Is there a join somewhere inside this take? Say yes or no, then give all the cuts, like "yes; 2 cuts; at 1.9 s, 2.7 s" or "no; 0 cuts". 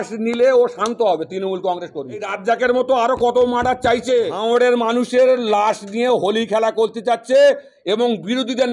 yes; 2 cuts; at 2.3 s, 4.3 s